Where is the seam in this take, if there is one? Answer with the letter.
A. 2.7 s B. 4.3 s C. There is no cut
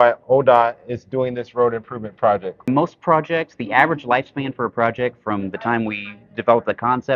A